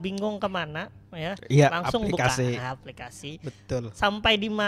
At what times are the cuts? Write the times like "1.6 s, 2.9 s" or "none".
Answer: none